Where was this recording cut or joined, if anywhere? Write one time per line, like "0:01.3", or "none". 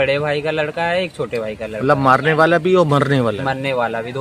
none